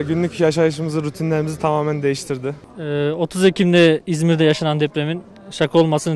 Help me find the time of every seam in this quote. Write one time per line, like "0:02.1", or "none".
0:02.7